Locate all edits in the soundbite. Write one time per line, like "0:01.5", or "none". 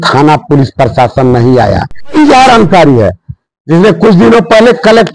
0:02.2